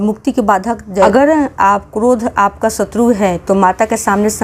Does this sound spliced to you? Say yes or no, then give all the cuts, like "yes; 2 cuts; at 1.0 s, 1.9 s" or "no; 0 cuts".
yes; 1 cut; at 1.1 s